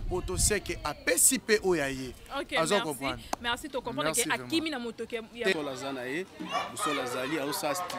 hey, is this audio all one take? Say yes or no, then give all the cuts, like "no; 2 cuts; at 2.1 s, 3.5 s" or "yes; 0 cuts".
no; 1 cut; at 5.5 s